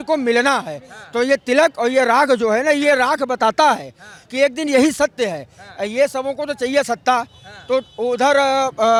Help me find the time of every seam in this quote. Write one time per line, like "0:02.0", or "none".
none